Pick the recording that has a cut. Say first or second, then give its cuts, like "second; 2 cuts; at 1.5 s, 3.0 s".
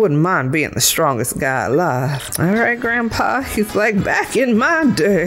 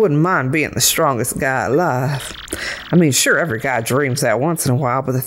first; 1 cut; at 2.2 s